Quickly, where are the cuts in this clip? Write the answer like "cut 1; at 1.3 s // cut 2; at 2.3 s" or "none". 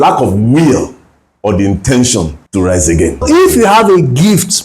cut 1; at 2.4 s // cut 2; at 3.2 s